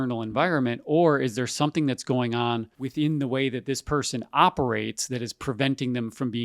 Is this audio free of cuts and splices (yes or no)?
no